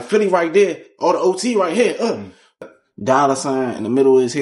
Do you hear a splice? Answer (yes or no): yes